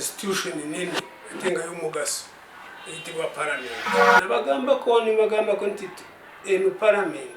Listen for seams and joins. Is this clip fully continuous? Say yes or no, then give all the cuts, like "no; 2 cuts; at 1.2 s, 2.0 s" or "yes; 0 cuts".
no; 1 cut; at 4.1 s